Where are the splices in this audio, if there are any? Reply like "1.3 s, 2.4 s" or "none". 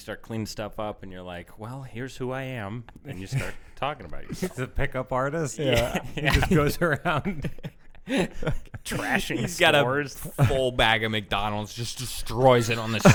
none